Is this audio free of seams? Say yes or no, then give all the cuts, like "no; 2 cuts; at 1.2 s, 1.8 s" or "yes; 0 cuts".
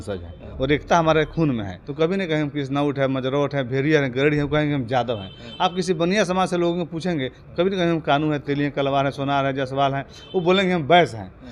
no; 1 cut; at 1.8 s